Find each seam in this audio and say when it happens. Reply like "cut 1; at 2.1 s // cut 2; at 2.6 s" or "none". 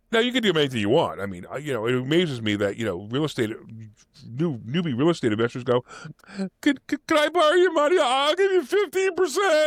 none